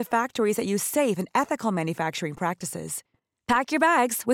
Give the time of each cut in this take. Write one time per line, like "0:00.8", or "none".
none

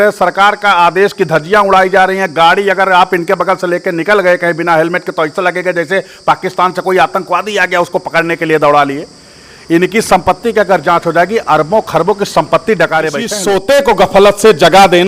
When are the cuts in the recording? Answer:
0:13.3

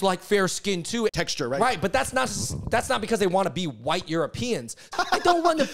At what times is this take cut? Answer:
0:01.1
0:04.9

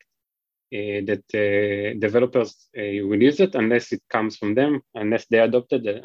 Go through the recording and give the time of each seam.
none

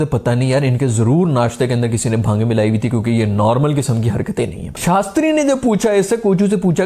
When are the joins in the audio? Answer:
none

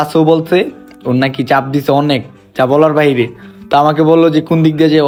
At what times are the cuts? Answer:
none

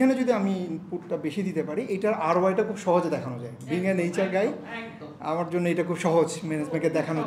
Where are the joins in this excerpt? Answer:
none

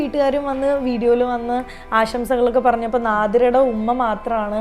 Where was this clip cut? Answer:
none

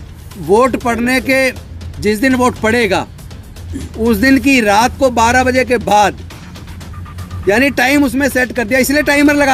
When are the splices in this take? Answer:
none

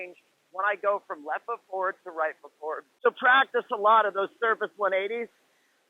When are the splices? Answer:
0:02.9

